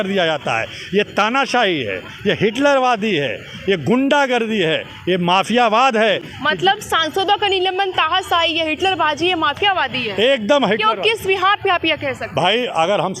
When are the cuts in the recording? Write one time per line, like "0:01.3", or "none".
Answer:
none